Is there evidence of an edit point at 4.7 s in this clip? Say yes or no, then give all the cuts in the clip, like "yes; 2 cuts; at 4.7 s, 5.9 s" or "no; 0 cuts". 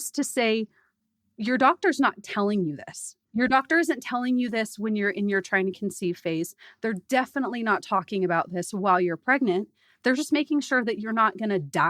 no; 1 cut; at 3.1 s